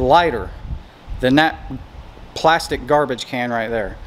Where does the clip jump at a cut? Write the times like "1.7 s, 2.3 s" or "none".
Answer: none